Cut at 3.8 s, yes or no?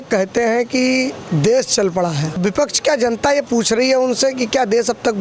no